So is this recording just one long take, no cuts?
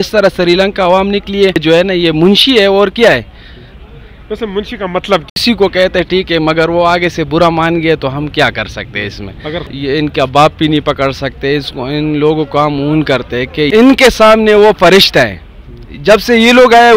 no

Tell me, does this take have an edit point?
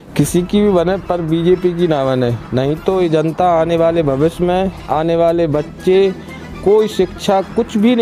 no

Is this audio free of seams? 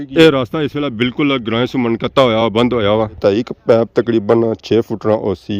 no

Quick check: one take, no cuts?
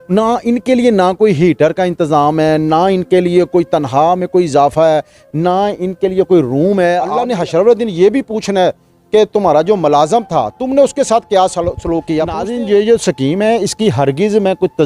no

